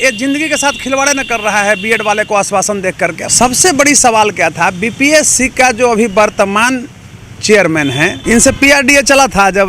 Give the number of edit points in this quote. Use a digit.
2